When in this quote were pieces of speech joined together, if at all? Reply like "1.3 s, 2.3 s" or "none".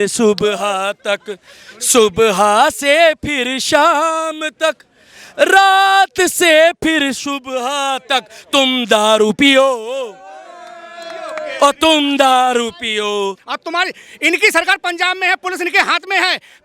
13.5 s